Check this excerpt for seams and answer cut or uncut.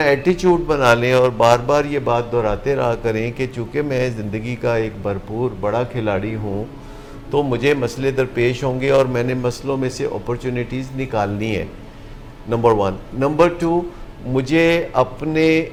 uncut